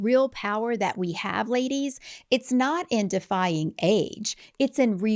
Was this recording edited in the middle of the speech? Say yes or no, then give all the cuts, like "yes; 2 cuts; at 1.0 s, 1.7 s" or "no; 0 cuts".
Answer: no; 0 cuts